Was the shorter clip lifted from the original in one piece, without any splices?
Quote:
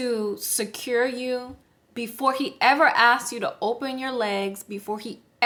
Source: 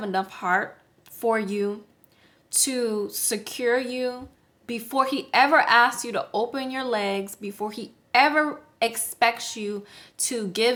yes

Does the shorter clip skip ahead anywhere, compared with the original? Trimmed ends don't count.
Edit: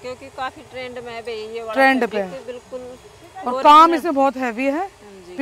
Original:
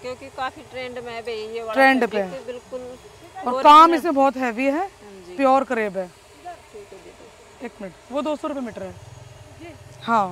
no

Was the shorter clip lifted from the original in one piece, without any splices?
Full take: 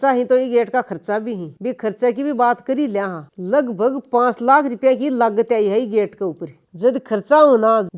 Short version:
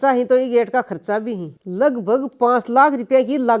no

